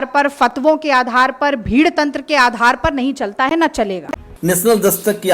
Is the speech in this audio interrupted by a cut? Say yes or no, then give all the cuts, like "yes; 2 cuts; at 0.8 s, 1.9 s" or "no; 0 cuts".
no; 0 cuts